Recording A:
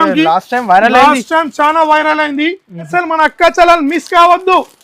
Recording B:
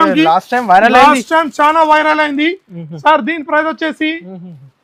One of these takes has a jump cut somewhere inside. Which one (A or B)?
A